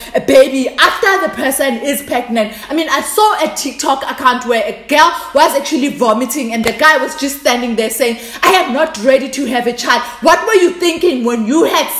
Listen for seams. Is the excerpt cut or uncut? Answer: uncut